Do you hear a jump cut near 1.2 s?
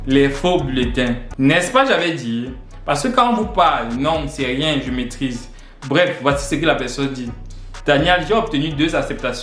yes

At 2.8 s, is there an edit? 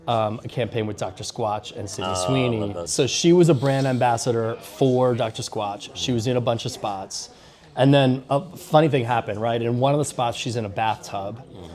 yes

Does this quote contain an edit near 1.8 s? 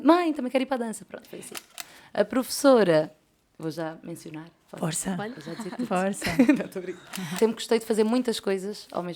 yes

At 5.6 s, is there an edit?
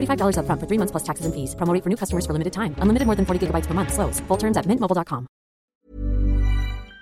yes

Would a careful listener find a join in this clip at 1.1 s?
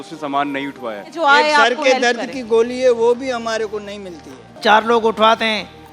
yes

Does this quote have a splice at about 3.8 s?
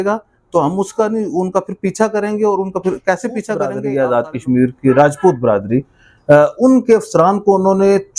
yes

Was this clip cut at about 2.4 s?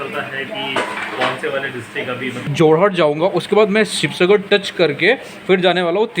yes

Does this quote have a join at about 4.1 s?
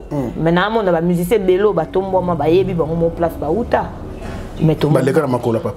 no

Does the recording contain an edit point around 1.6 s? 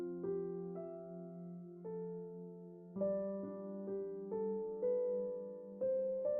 no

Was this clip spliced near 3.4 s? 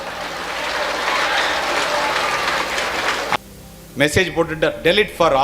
yes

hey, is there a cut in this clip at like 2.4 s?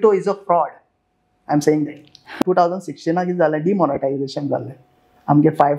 yes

